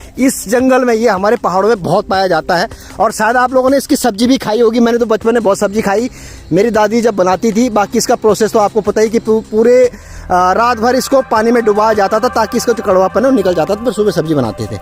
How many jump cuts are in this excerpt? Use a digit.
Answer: 0